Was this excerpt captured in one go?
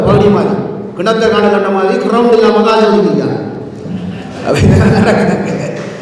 yes; 0 cuts

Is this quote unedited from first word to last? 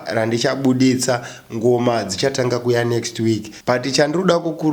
no; 1 cut; at 3.5 s

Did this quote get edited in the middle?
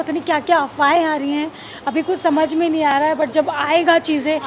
no; 0 cuts

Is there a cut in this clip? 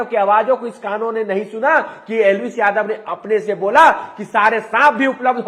no; 0 cuts

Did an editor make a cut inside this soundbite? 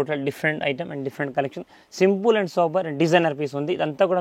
no; 0 cuts

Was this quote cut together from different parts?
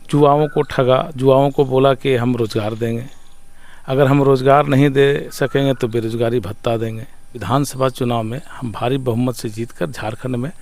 yes; 1 cut; at 7.4 s

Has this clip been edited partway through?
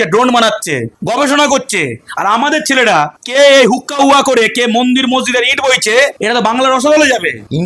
no; 0 cuts

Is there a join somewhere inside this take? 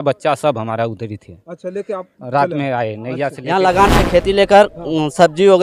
yes; 1 cut; at 3.4 s

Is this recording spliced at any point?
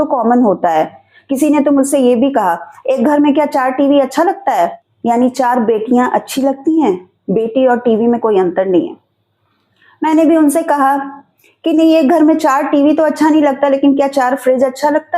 yes; 1 cut; at 4.9 s

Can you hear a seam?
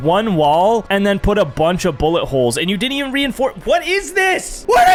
no; 0 cuts

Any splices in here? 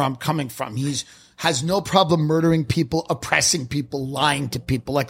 no; 0 cuts

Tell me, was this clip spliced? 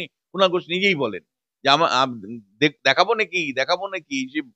no; 0 cuts

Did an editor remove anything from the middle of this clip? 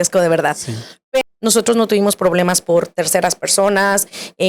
yes; 1 cut; at 1.2 s

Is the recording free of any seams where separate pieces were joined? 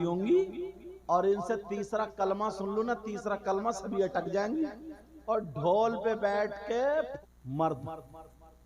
no; 1 cut; at 7.1 s

